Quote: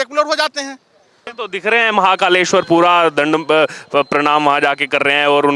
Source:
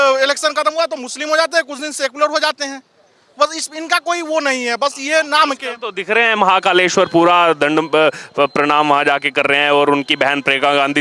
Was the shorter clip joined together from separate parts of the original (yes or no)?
yes